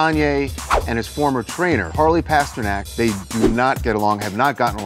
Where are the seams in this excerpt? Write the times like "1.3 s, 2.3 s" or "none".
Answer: 1.9 s, 2.9 s

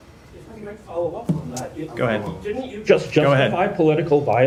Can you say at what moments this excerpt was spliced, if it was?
none

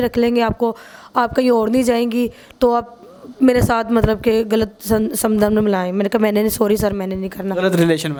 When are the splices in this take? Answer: none

